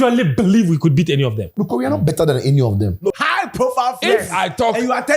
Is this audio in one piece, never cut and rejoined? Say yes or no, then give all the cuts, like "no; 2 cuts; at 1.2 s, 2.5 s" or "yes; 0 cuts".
no; 2 cuts; at 1.4 s, 3.1 s